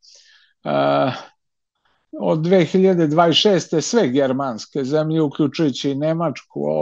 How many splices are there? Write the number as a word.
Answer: zero